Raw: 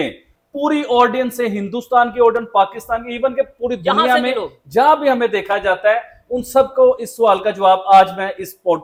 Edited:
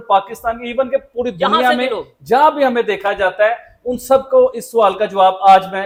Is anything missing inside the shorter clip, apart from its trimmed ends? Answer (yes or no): no